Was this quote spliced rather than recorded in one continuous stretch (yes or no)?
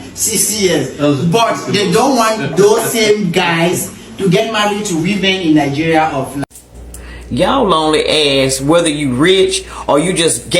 yes